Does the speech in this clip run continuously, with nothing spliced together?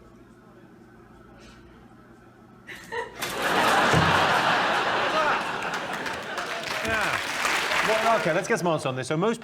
no; 1 cut; at 7.8 s

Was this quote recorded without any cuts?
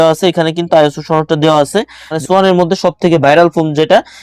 no; 1 cut; at 2.2 s

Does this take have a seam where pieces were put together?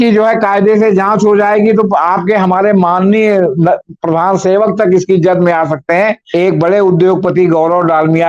yes; 1 cut; at 6.2 s

